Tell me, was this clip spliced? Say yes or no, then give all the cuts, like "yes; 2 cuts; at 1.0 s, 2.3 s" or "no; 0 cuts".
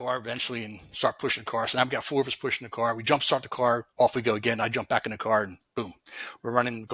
no; 0 cuts